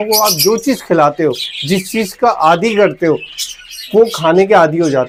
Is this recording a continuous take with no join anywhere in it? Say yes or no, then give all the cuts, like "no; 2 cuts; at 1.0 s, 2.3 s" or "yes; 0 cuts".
yes; 0 cuts